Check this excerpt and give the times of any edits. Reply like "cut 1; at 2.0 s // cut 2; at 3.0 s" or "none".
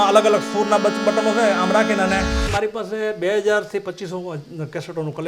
cut 1; at 2.5 s